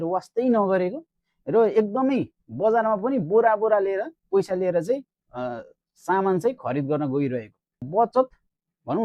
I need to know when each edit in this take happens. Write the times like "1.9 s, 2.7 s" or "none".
7.8 s